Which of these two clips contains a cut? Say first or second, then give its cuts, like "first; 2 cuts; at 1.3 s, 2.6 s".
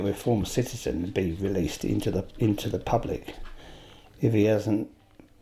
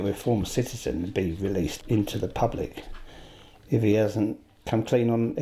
second; 2 cuts; at 1.8 s, 4.5 s